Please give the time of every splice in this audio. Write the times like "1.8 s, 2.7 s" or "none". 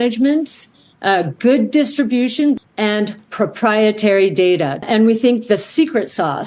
2.6 s, 4.8 s